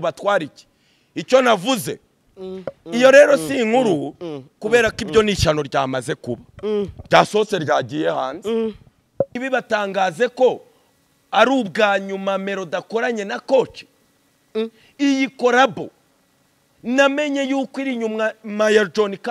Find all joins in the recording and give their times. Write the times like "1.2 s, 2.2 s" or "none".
9.4 s